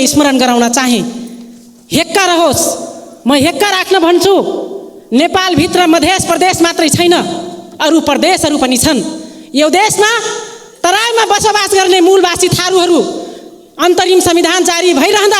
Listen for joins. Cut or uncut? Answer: uncut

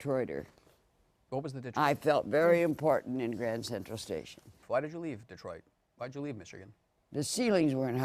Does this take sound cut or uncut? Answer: cut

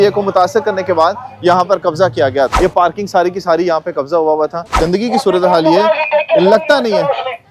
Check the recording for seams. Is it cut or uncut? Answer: cut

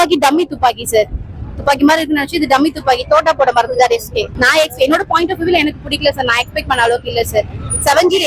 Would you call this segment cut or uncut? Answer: uncut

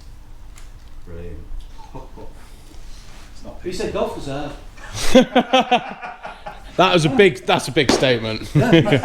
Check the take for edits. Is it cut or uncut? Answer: cut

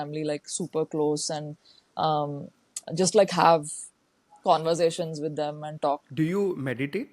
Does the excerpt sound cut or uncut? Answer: cut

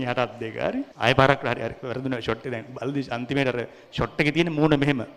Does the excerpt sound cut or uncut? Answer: cut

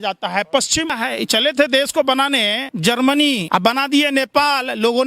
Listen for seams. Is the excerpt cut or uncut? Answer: cut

